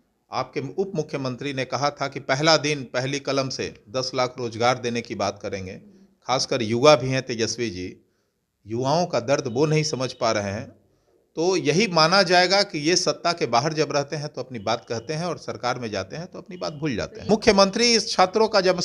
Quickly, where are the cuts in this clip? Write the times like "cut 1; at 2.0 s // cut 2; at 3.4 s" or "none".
cut 1; at 17.3 s